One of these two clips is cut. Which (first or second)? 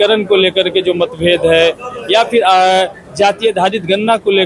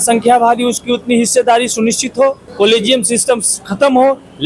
second